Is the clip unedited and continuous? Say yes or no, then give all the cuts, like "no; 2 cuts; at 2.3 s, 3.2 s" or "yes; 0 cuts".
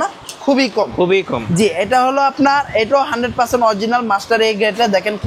yes; 0 cuts